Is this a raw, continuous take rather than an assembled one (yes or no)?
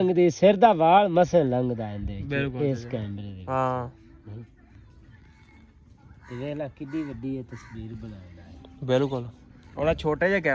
yes